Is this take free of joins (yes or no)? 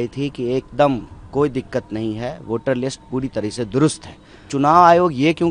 no